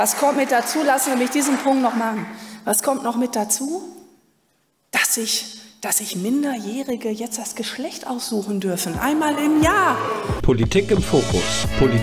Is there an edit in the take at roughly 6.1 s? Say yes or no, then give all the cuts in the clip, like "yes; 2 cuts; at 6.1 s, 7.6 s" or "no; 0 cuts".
no; 1 cut; at 10.3 s